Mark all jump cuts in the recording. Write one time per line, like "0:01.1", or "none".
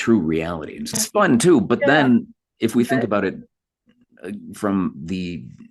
0:01.0